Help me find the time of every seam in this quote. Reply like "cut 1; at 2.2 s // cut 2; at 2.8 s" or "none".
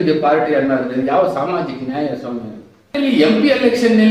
cut 1; at 2.9 s